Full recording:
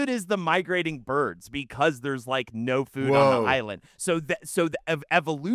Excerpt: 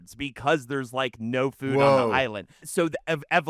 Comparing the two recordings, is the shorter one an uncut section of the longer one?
no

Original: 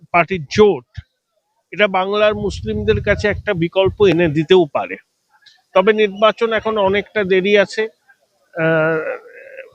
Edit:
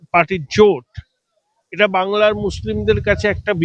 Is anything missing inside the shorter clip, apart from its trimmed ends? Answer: no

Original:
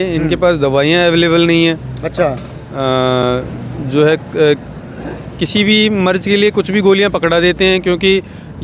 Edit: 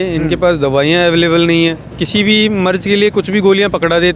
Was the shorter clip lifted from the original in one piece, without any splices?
no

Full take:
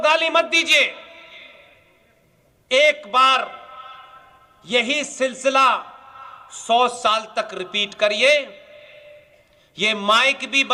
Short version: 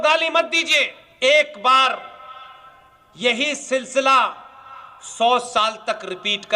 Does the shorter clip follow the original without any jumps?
no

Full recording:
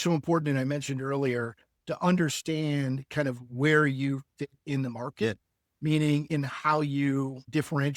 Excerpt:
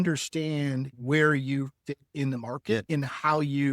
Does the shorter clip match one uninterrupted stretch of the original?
no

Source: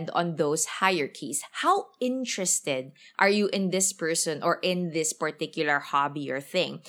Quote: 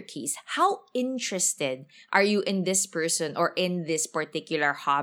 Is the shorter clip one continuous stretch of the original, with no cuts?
yes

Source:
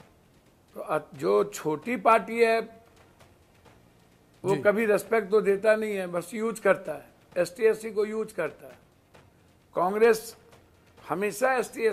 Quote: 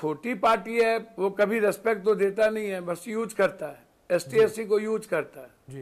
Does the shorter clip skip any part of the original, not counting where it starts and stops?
yes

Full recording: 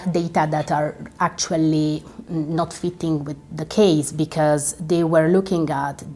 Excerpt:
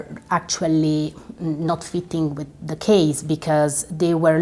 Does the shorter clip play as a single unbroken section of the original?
yes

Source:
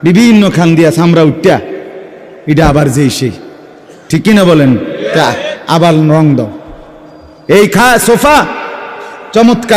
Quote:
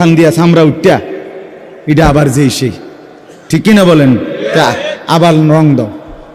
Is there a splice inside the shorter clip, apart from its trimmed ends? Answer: no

